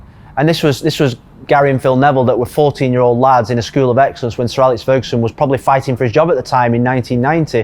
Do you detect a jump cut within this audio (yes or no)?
no